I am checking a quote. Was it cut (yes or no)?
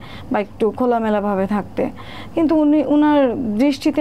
no